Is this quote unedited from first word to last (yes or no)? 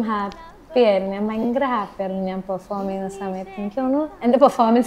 yes